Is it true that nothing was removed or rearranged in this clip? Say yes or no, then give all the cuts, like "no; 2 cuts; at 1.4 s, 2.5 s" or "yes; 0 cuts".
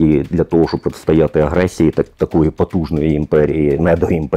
yes; 0 cuts